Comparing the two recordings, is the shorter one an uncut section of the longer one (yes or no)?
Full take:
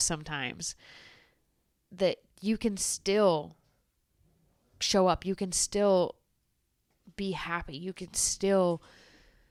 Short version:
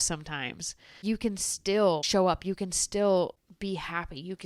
no